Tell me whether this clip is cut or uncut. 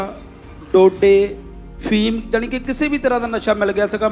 uncut